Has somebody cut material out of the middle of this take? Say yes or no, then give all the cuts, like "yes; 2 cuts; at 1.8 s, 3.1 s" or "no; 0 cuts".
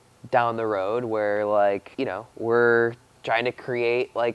yes; 1 cut; at 1.9 s